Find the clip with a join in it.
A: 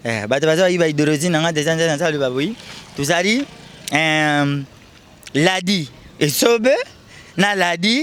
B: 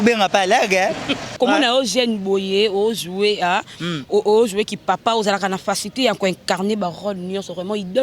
B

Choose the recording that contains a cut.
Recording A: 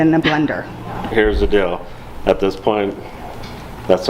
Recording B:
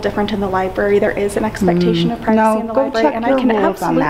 A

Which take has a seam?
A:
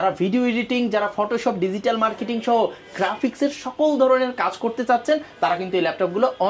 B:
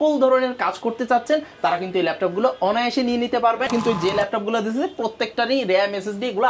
B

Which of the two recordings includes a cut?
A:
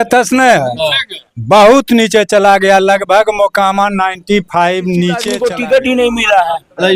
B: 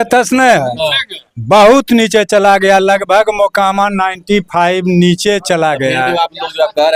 A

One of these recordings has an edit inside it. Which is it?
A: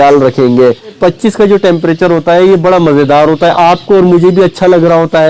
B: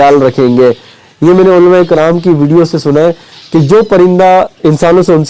A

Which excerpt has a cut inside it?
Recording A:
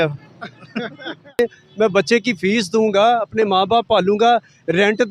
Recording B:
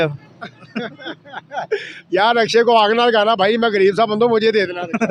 A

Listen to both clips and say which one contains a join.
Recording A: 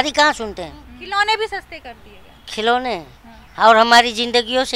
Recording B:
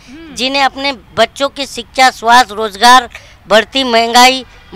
A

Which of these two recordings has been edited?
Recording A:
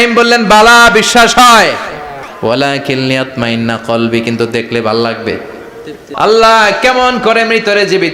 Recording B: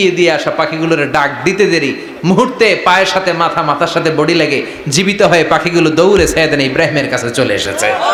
A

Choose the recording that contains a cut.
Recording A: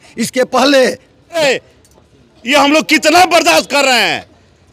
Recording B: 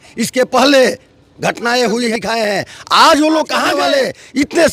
A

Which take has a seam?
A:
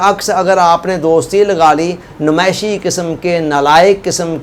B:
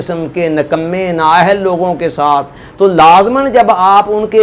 B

